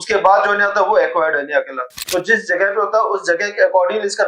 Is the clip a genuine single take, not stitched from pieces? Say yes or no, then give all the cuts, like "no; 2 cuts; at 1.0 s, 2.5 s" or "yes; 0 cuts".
no; 1 cut; at 2.0 s